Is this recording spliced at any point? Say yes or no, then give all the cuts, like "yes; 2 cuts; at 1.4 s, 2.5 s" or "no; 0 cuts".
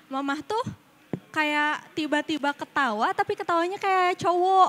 no; 0 cuts